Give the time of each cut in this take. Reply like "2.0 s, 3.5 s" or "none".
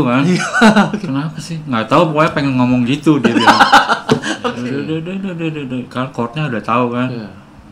4.4 s